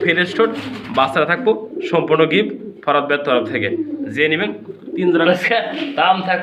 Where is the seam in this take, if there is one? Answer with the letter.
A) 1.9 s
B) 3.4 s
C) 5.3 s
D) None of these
C